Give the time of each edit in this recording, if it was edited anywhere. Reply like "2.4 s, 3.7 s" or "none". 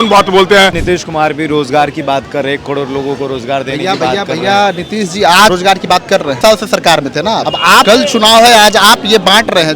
0.8 s, 6.0 s, 7.7 s